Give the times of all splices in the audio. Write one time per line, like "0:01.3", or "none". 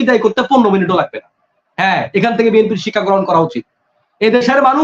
none